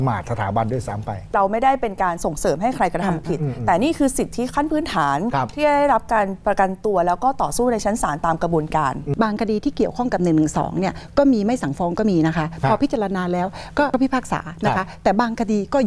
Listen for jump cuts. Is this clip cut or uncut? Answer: cut